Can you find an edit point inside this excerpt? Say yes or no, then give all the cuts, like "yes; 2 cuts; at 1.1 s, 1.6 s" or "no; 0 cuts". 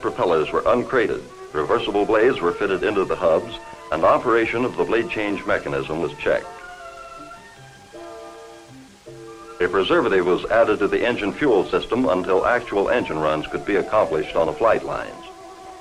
yes; 1 cut; at 7.9 s